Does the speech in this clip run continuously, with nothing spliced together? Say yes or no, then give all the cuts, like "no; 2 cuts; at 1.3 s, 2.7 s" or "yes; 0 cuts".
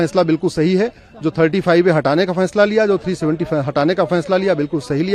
yes; 0 cuts